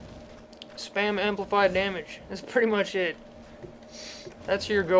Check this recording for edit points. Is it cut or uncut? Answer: cut